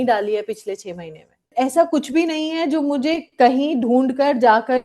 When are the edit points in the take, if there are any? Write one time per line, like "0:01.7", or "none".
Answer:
0:01.5